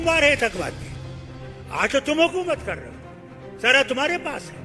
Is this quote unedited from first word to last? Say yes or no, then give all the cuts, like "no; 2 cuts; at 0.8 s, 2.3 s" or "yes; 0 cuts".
yes; 0 cuts